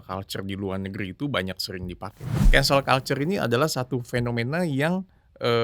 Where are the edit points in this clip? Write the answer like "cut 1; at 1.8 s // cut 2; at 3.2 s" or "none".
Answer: cut 1; at 2.3 s